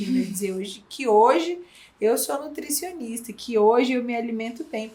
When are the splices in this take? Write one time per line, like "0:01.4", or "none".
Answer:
none